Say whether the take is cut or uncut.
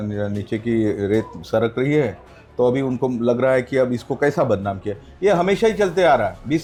uncut